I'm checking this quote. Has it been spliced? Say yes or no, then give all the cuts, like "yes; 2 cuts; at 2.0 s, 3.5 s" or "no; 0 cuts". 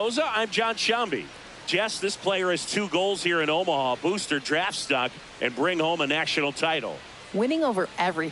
yes; 1 cut; at 1.4 s